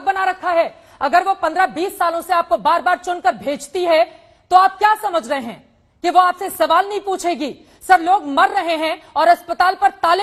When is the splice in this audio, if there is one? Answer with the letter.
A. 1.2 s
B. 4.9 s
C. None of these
C